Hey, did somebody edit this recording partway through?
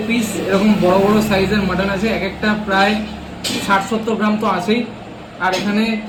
no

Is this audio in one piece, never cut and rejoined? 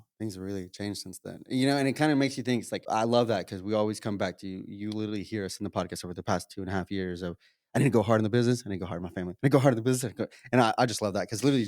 no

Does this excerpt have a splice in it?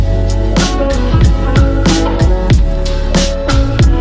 no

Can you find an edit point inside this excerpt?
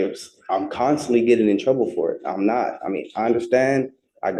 no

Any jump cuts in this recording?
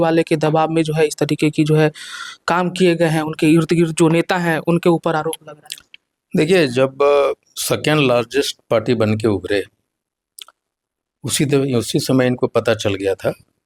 no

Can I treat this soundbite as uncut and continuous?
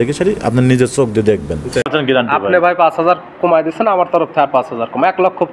no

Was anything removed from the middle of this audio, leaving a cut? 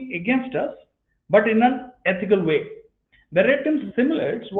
no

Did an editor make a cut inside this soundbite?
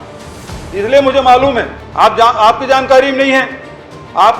yes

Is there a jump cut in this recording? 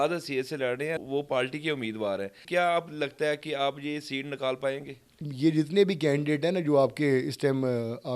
yes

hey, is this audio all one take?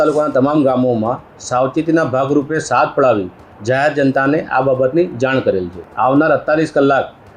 no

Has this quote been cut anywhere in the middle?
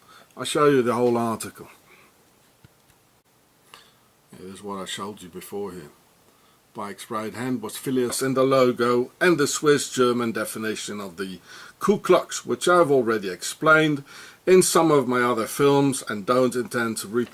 no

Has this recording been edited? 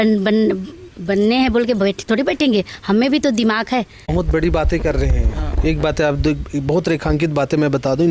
yes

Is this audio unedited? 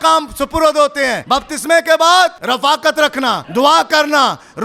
no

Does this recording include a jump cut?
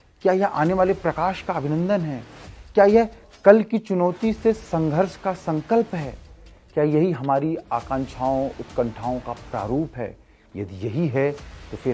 no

